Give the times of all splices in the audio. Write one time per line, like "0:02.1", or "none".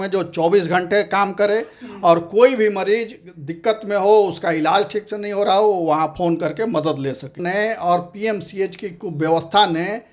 0:07.4